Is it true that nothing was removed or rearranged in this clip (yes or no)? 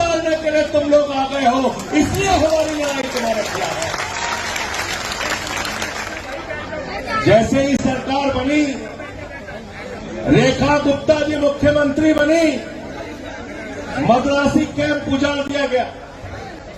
no